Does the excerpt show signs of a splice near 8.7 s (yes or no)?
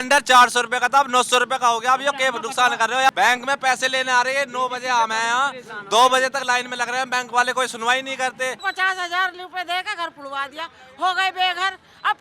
yes